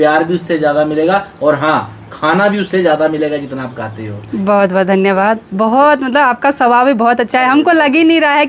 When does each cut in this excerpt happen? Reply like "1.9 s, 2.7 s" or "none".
none